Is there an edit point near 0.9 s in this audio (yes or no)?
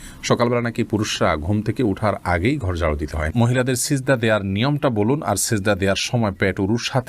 no